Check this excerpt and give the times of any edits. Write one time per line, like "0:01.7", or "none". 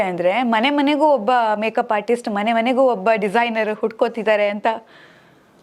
none